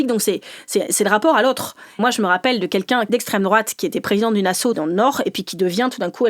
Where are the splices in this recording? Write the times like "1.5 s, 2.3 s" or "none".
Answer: 2.0 s, 3.1 s, 4.7 s